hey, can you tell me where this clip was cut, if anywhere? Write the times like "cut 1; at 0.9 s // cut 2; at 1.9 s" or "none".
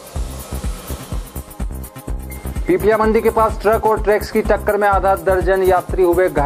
none